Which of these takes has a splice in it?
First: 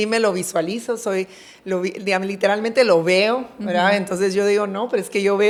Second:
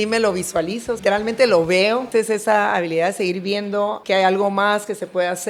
second; 3 cuts; at 1.0 s, 2.1 s, 4.0 s

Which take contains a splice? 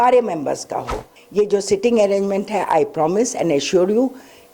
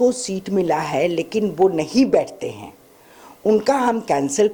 first; 1 cut; at 1.2 s

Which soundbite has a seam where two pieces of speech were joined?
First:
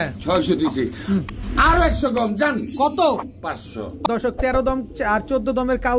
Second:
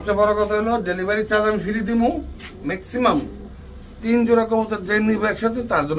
first; 1 cut; at 4.1 s

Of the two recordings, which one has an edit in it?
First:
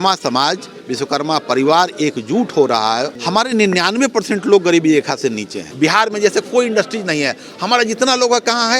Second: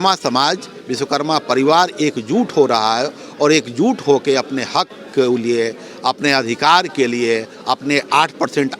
first; 2 cuts; at 3.2 s, 5.6 s

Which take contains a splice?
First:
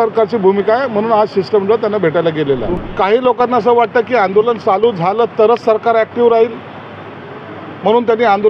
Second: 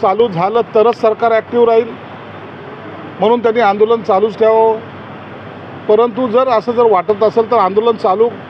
first; 1 cut; at 2.8 s

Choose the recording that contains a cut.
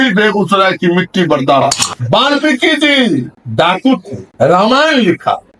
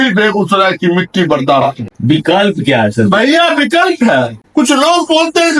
first; 1 cut; at 1.9 s

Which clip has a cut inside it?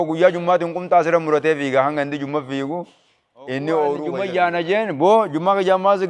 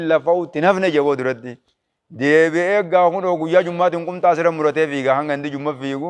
first; 1 cut; at 4.1 s

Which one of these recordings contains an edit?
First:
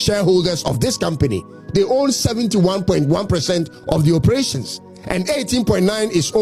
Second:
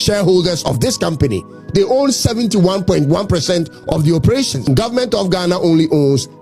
second; 1 cut; at 4.7 s

